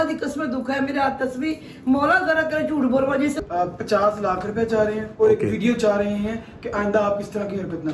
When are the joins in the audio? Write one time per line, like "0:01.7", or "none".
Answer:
0:03.4